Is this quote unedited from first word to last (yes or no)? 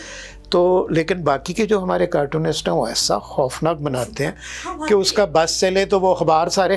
yes